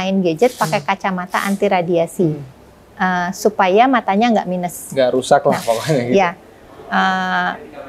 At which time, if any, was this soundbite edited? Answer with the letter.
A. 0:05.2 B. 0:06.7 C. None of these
C